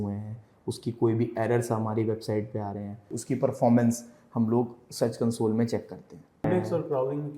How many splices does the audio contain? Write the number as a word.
two